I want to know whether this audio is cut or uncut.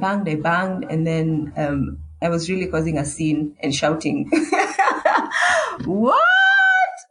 uncut